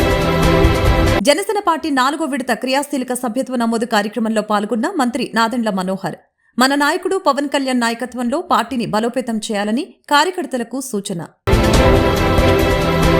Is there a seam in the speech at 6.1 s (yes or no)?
no